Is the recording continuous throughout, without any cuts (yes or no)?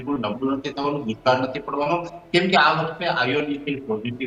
yes